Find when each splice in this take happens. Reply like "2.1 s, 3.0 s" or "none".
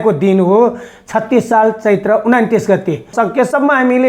3.1 s